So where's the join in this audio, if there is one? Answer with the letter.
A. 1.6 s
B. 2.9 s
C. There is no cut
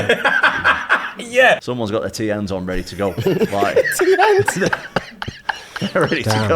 A